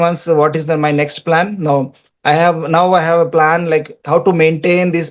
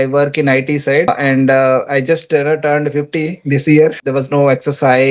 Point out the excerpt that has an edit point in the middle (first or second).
second